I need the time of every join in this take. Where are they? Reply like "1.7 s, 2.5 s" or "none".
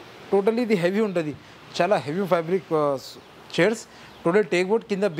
none